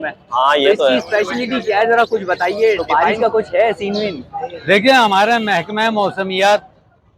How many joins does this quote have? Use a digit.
1